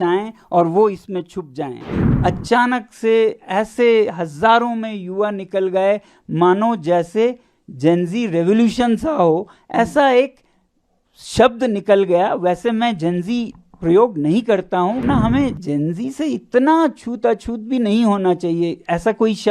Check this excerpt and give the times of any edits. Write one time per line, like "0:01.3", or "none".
0:02.0
0:15.0